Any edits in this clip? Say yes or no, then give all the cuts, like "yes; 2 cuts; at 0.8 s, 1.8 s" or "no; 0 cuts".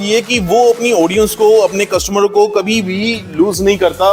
no; 0 cuts